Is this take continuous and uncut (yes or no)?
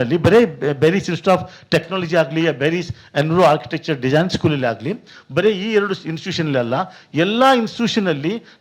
yes